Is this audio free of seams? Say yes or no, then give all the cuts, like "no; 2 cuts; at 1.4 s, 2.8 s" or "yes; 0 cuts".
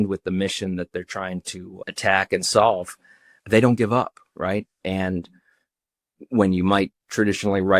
yes; 0 cuts